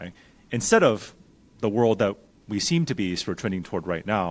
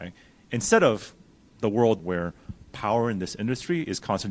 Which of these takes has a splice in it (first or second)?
second